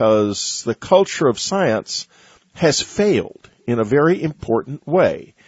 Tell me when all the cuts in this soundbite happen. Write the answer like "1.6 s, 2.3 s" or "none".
2.8 s